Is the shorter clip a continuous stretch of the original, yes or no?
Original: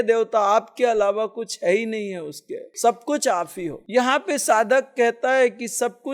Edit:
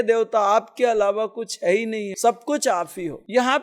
no